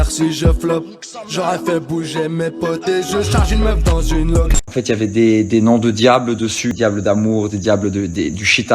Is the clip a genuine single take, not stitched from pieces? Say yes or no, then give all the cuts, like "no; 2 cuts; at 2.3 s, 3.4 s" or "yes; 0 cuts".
no; 2 cuts; at 4.7 s, 6.8 s